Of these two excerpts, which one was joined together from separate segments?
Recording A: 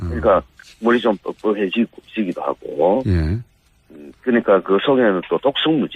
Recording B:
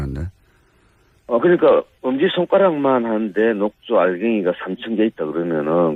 A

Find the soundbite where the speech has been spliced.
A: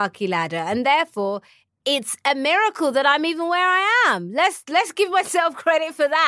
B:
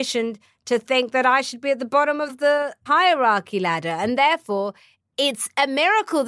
B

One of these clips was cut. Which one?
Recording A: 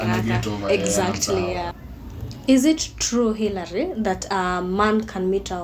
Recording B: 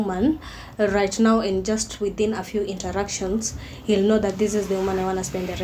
A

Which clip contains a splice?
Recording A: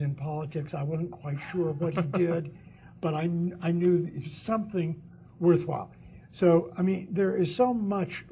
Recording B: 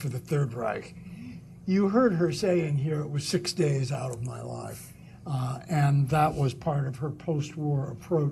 B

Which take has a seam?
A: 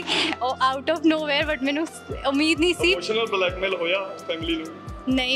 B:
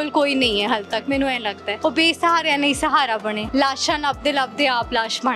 B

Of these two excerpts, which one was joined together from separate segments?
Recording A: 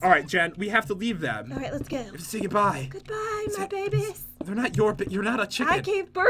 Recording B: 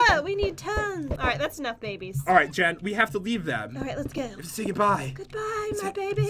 B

